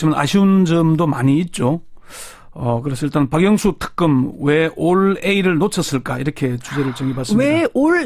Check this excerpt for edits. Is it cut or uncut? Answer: uncut